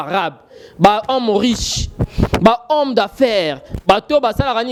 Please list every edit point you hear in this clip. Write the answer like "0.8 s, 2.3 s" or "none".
none